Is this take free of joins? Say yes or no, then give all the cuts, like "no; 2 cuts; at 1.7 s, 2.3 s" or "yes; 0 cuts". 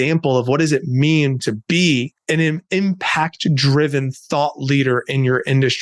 no; 1 cut; at 2.2 s